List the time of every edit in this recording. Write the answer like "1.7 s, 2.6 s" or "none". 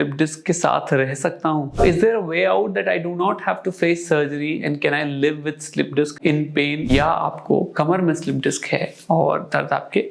1.8 s, 6.3 s